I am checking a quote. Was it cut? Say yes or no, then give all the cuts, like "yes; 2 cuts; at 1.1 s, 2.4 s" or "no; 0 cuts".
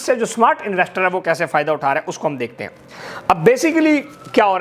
no; 0 cuts